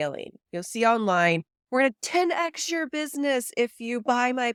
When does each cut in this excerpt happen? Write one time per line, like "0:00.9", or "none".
none